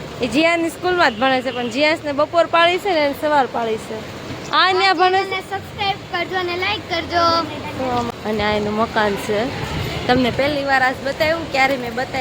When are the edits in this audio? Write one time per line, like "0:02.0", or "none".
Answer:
0:08.1